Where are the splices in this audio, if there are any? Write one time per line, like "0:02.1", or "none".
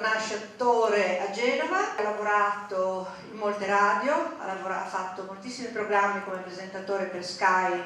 0:02.0